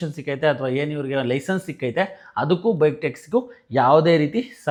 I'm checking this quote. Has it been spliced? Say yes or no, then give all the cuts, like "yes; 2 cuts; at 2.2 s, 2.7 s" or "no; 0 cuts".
no; 0 cuts